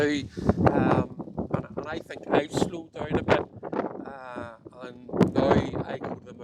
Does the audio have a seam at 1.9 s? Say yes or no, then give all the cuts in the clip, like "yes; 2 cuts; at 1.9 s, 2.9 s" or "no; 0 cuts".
no; 0 cuts